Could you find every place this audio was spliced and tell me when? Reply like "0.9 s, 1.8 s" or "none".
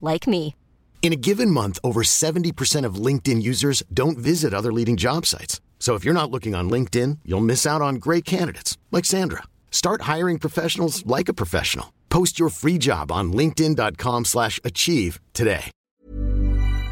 15.9 s